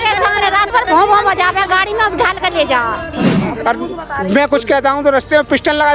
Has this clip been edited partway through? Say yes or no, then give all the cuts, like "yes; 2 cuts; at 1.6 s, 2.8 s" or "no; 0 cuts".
yes; 1 cut; at 3.1 s